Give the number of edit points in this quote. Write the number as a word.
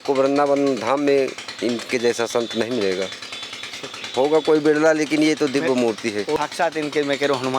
one